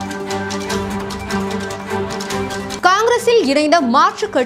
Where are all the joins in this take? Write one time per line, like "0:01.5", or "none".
none